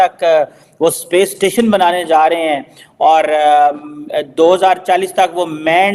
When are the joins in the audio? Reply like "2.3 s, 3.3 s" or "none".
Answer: none